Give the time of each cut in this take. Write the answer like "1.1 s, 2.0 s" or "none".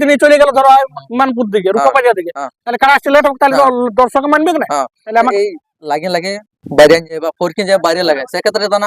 5.3 s